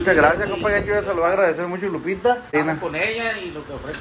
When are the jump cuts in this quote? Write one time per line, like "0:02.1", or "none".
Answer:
0:02.6